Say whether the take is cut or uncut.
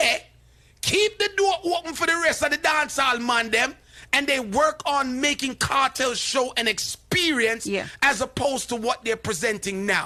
uncut